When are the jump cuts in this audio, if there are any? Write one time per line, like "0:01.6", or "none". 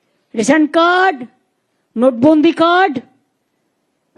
none